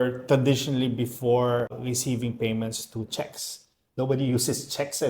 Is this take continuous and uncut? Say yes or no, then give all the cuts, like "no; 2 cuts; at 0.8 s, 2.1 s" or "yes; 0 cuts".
no; 1 cut; at 1.7 s